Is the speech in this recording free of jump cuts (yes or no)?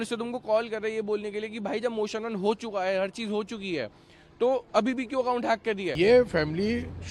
no